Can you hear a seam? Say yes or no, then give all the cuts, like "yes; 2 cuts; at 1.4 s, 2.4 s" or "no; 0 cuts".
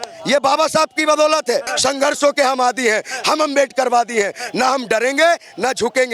yes; 1 cut; at 1.7 s